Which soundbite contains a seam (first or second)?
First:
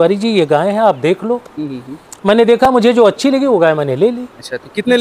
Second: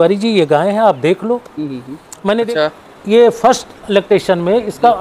second